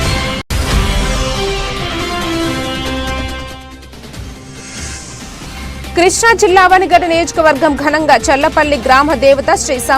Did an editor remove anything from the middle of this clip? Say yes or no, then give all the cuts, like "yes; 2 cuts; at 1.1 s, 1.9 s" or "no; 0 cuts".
yes; 1 cut; at 6.0 s